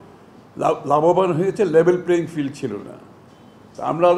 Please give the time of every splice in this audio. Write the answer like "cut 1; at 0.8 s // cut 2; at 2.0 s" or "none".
none